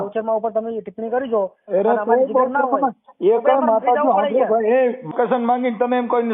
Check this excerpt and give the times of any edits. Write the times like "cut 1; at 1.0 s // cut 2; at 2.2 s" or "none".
cut 1; at 5.1 s